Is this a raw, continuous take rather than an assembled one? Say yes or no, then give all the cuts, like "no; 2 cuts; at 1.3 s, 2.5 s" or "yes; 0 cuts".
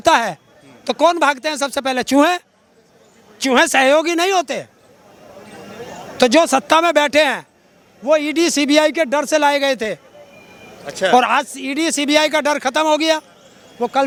yes; 0 cuts